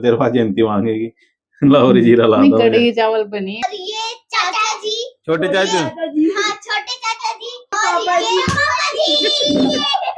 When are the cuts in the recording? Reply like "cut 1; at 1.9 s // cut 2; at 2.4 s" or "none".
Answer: cut 1; at 3.6 s // cut 2; at 7.8 s